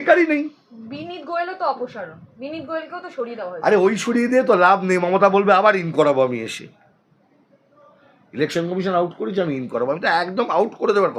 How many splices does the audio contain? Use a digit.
0